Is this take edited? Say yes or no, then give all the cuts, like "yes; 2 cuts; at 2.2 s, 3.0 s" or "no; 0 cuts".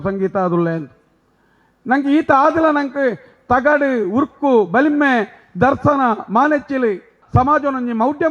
yes; 1 cut; at 7.2 s